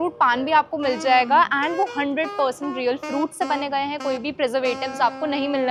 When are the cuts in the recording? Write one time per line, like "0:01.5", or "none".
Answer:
none

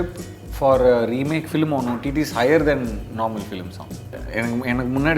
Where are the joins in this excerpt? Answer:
0:04.2

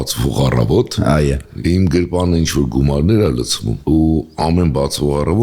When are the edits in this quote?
0:01.5

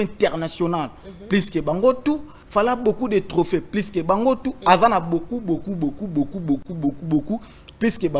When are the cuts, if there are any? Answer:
0:02.4

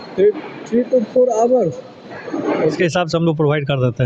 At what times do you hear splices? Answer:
0:02.7

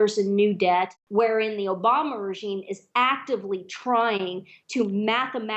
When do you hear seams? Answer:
0:01.0

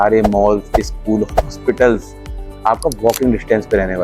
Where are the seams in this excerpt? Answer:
none

